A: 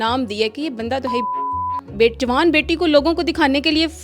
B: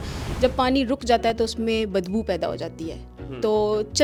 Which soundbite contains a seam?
A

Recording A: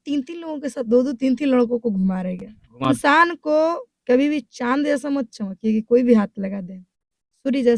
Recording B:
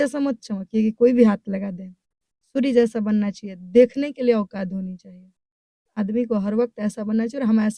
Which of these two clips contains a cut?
A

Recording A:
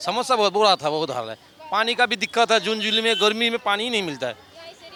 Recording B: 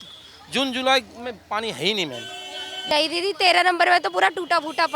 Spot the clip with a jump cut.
B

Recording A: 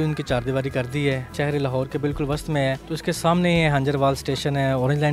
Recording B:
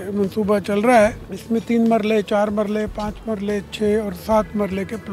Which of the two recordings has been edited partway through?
A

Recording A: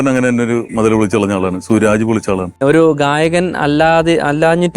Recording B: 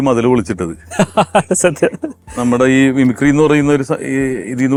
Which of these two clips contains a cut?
A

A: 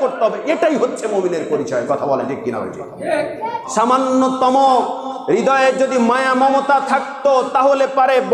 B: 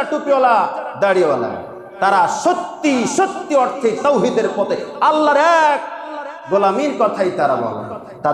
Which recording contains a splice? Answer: A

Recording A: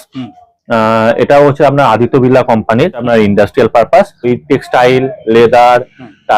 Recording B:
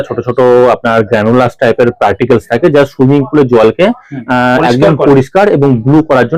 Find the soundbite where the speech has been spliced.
A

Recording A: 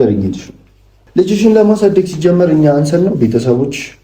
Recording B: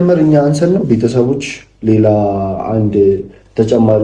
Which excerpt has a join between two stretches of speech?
A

